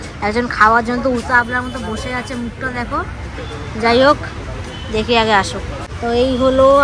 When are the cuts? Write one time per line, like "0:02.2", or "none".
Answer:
none